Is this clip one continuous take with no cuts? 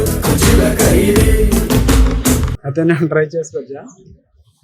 no; 1 cut; at 2.5 s

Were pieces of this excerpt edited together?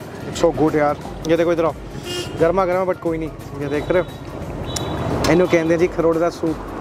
no; 0 cuts

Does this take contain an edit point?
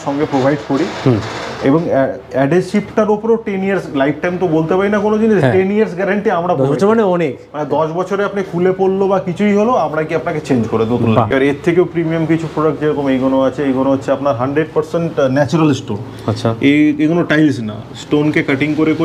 yes; 1 cut; at 11.3 s

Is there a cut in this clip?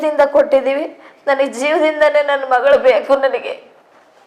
no; 0 cuts

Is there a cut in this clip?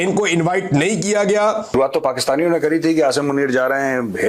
yes; 1 cut; at 1.7 s

